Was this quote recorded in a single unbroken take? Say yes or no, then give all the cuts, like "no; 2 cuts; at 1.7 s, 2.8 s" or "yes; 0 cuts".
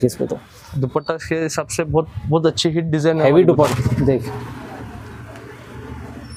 no; 1 cut; at 3.7 s